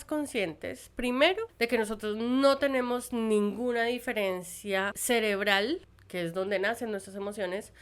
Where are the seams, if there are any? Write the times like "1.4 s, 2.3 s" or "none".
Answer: 1.5 s, 5.0 s, 6.0 s